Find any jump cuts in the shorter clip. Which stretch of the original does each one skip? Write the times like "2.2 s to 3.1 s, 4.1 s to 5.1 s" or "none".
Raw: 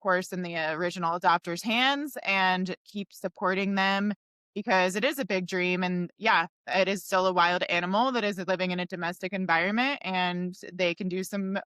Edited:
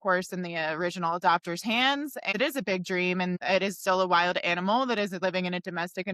2.3 s to 4.9 s, 6.0 s to 6.6 s